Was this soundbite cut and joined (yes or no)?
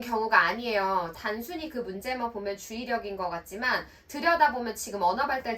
yes